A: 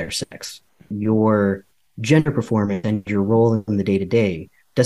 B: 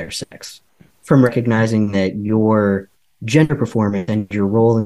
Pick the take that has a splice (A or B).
A